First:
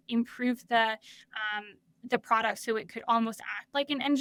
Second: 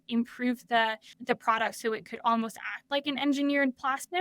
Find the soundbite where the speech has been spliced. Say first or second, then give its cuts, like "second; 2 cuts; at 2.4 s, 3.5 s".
second; 1 cut; at 1.1 s